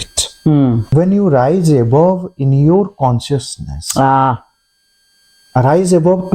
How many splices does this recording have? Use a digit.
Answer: 1